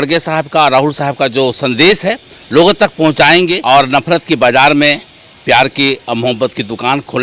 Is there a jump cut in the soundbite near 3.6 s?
yes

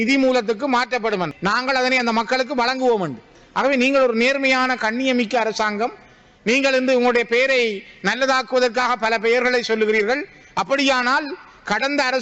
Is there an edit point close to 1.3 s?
yes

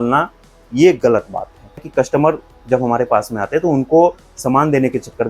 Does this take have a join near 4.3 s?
no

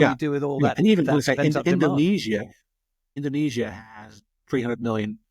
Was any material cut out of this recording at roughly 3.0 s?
yes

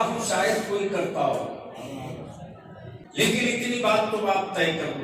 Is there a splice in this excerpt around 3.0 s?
yes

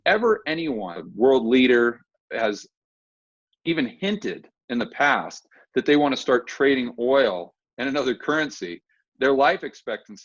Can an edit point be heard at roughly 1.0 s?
yes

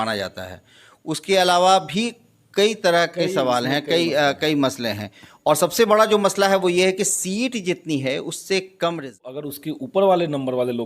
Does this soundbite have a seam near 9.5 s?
yes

